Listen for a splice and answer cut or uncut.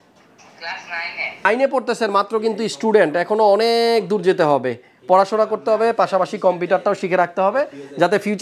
cut